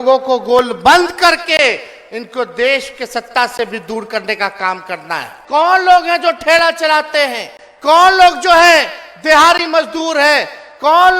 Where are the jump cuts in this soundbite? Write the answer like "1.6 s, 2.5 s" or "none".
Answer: 5.3 s

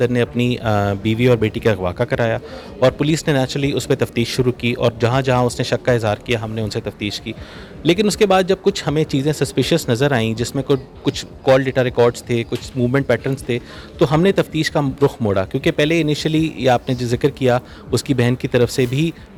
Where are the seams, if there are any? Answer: none

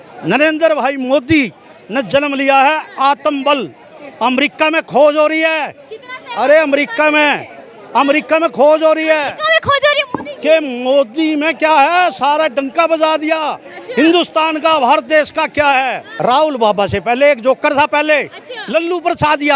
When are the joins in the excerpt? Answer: 16.1 s

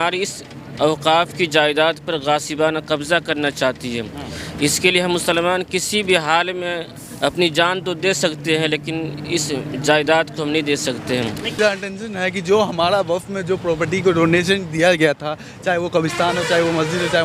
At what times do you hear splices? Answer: 11.6 s

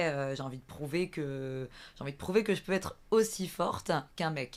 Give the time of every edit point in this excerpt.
none

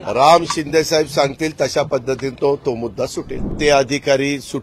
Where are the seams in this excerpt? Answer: 3.5 s

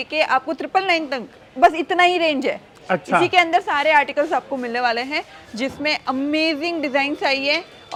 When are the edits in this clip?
none

